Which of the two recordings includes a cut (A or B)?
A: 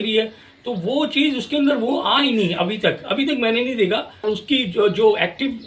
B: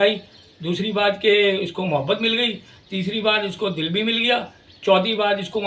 A